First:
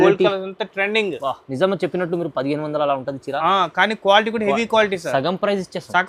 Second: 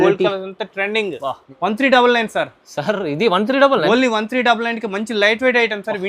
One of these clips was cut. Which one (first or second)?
second